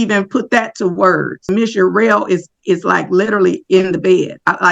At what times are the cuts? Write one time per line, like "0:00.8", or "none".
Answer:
0:01.5